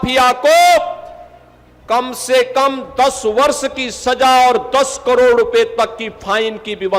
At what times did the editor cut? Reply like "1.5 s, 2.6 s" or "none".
none